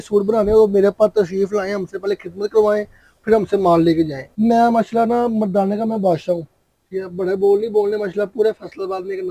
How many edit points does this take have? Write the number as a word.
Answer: one